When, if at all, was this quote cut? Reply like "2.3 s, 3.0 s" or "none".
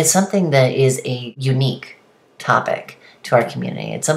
1.3 s